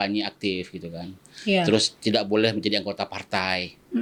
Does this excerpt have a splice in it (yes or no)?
no